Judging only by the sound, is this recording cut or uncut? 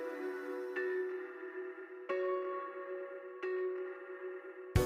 uncut